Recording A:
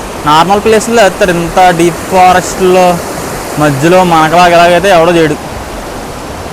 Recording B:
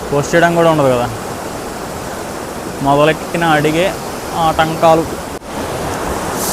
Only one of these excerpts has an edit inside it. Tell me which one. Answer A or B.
B